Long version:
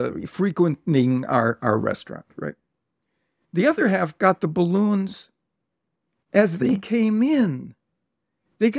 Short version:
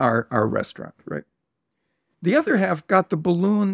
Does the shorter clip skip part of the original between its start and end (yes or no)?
no